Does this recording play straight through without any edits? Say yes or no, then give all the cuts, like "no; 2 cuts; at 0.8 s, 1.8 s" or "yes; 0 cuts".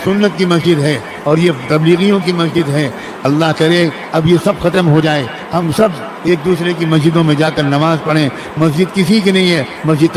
yes; 0 cuts